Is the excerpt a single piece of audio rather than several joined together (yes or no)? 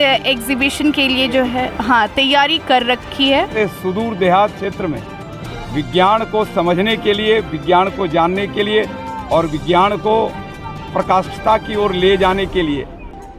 no